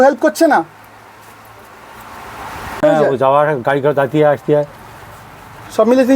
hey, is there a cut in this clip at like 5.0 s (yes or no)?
no